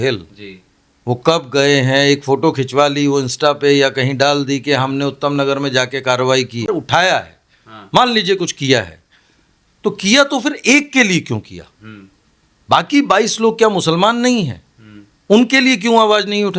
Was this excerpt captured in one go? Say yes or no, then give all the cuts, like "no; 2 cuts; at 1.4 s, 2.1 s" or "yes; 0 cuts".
no; 1 cut; at 6.7 s